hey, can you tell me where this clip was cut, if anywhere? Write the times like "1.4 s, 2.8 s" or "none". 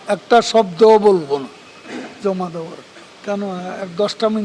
3.1 s